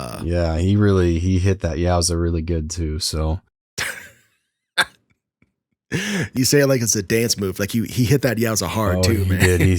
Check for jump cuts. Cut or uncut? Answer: cut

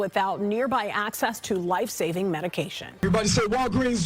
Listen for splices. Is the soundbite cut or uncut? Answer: cut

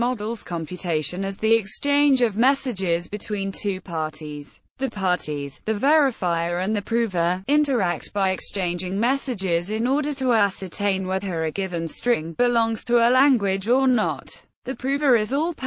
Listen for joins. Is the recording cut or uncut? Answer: cut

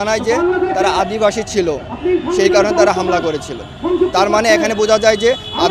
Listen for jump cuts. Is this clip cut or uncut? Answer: uncut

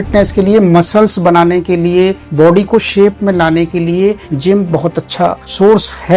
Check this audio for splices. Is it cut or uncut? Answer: uncut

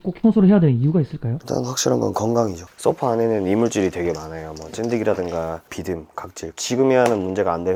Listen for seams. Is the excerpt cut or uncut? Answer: uncut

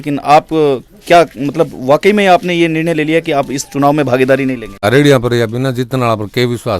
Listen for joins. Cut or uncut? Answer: cut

